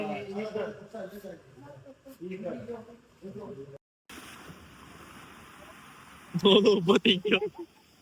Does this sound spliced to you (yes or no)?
yes